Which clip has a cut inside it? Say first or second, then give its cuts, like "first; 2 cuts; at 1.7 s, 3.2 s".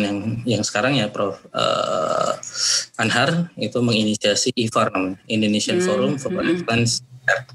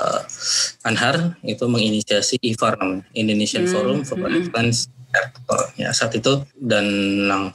second; 1 cut; at 6.5 s